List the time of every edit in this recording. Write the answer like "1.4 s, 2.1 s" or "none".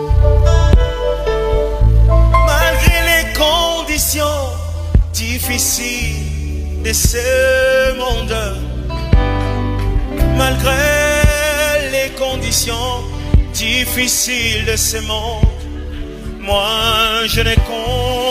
none